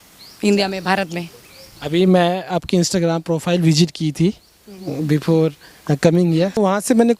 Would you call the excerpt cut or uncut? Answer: uncut